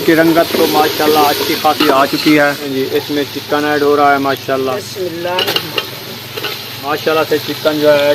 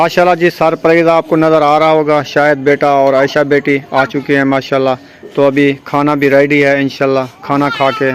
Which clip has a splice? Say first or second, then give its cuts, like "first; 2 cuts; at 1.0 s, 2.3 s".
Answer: first; 2 cuts; at 2.7 s, 6.9 s